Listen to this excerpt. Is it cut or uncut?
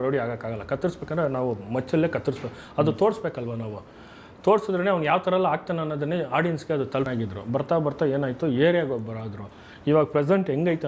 cut